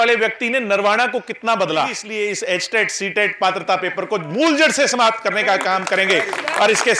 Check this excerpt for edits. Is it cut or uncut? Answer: cut